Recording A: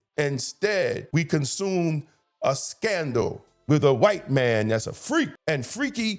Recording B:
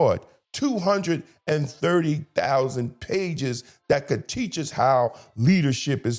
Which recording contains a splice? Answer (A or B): A